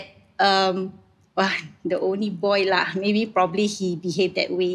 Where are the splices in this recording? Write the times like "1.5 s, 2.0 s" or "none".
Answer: none